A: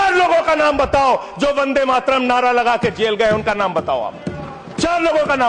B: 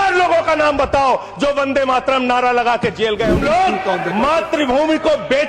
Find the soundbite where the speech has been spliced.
B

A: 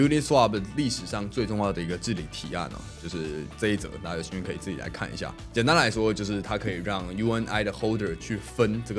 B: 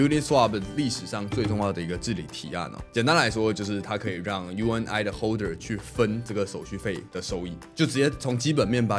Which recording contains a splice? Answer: B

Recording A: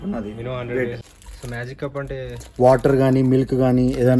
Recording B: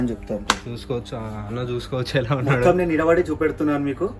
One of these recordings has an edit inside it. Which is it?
A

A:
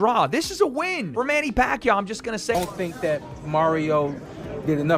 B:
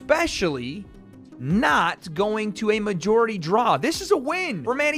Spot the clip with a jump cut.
A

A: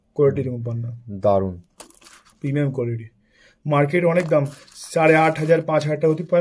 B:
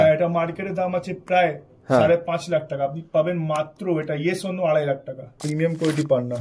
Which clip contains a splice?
B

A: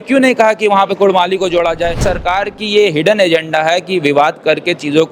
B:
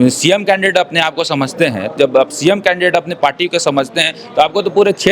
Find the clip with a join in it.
A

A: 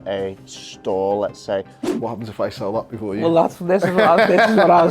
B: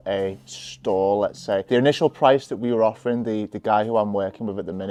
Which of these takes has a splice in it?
A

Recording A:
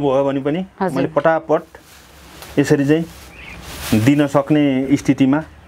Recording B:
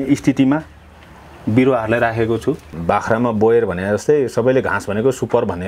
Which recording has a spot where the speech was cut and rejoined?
B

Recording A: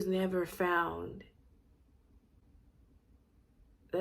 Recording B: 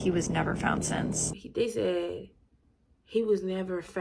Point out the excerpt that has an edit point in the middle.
B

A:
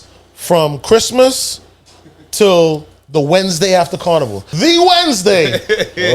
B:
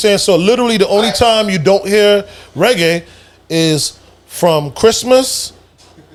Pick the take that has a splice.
A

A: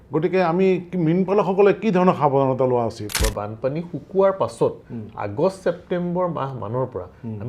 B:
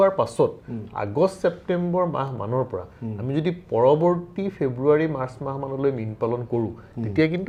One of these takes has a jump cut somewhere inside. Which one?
A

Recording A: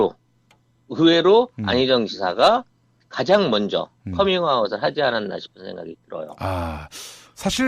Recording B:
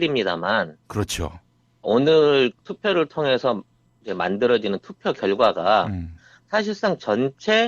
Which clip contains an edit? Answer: B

